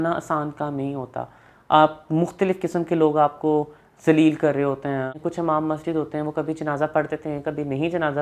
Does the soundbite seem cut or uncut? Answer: cut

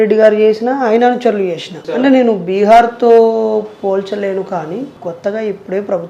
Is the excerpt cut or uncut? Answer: cut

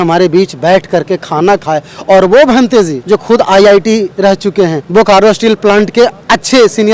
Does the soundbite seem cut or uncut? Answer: cut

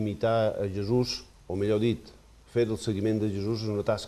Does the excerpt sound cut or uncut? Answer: cut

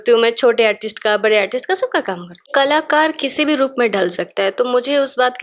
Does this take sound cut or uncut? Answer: cut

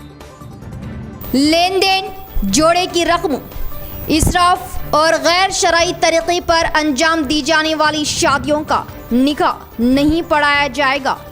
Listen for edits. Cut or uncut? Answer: cut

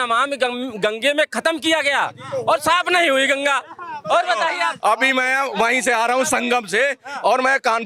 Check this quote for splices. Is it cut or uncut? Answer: uncut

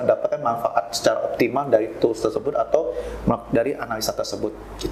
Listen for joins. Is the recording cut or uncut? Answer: uncut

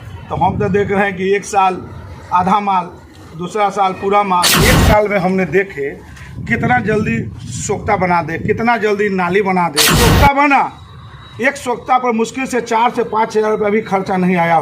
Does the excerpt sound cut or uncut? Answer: cut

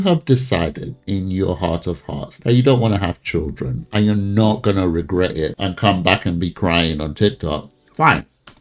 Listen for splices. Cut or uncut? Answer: cut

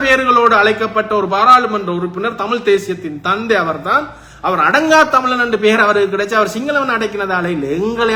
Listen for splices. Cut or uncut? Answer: uncut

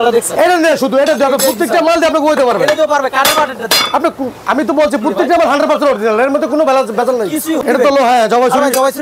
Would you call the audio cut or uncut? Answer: cut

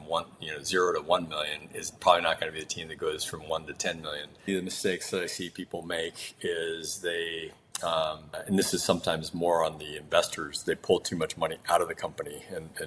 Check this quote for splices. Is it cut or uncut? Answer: cut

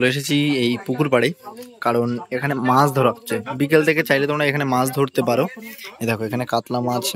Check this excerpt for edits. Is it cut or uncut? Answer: uncut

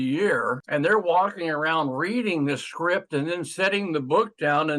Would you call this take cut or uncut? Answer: uncut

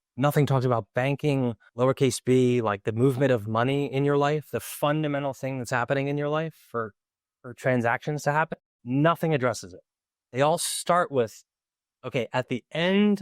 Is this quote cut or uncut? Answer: cut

